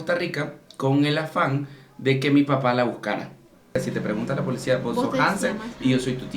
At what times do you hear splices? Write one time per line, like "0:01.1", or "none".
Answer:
0:03.8